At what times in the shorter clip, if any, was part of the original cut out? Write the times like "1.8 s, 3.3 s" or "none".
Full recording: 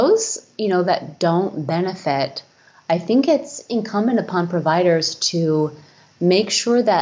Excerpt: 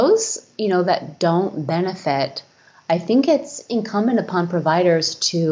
none